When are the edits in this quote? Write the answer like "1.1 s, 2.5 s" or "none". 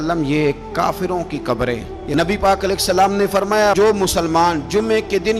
1.9 s